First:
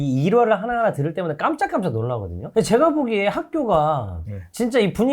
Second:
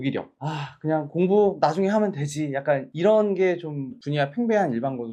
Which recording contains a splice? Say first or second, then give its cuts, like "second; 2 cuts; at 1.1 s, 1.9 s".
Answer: first; 1 cut; at 2.5 s